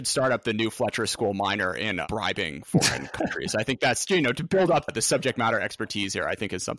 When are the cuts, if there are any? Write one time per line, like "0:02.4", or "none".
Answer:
0:02.0
0:04.9